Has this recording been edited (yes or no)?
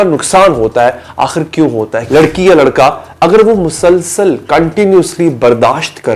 yes